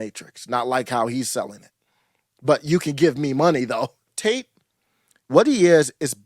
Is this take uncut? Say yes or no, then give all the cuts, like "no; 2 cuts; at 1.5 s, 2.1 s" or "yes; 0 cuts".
no; 1 cut; at 4.1 s